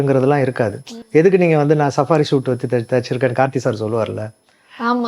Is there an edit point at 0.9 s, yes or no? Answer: yes